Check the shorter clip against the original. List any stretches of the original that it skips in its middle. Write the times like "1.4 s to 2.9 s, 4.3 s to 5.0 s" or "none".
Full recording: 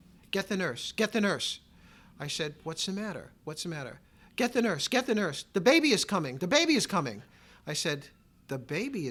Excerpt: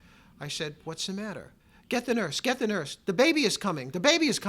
3.3 s to 4.0 s